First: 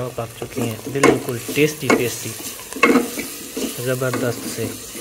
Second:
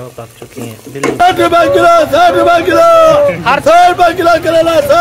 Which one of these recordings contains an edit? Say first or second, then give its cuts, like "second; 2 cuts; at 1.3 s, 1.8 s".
second; 1 cut; at 1.2 s